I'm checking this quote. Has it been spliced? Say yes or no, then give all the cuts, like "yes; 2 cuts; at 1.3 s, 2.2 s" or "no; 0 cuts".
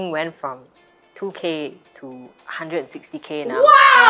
no; 0 cuts